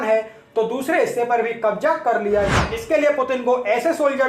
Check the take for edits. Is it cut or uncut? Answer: cut